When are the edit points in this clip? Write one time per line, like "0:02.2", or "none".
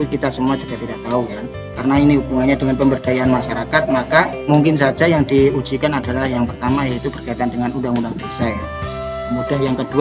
0:04.4